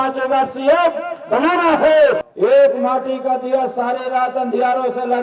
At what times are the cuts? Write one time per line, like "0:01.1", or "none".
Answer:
0:02.2